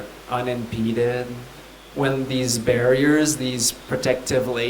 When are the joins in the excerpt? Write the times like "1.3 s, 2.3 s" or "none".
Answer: 1.8 s